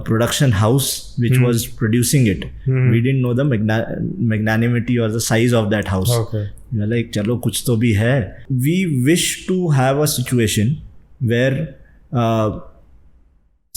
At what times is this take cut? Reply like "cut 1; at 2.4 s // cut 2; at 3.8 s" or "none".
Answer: cut 1; at 8.4 s